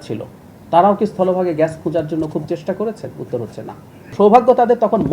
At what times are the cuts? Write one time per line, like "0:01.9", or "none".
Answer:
0:04.1